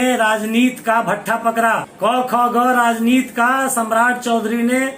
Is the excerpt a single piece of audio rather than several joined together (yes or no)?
no